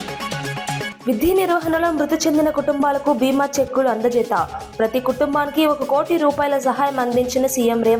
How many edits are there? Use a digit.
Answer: 1